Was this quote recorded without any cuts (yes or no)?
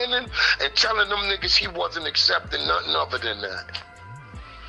no